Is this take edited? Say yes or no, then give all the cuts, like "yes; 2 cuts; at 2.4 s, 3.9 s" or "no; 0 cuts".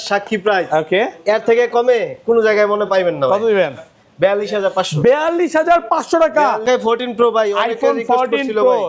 yes; 1 cut; at 6.6 s